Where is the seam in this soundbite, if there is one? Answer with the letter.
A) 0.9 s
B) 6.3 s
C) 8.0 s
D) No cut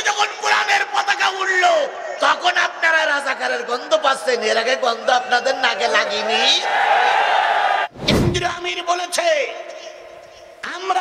C